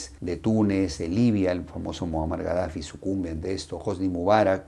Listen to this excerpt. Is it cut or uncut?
uncut